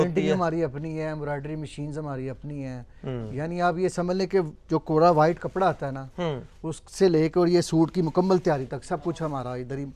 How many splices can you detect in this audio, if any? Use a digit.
0